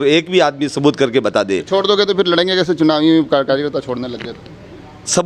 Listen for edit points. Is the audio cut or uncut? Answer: uncut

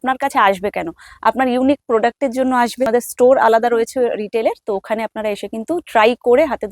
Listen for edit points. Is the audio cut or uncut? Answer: cut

